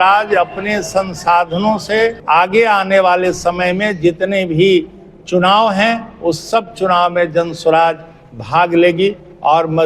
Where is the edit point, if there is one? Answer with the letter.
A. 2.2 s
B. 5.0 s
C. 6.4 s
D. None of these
A